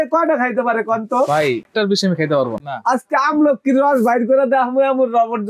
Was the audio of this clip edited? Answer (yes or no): yes